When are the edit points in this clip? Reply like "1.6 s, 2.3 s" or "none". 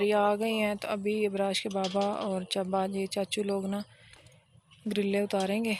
none